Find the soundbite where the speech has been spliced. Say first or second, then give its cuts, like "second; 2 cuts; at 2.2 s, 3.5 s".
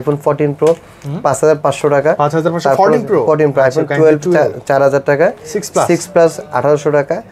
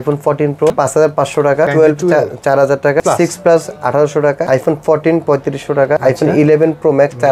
second; 5 cuts; at 0.7 s, 1.7 s, 3.0 s, 4.4 s, 6.0 s